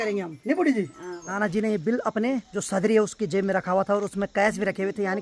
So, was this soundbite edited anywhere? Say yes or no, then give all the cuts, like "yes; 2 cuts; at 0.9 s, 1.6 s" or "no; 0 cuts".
yes; 2 cuts; at 1.4 s, 2.5 s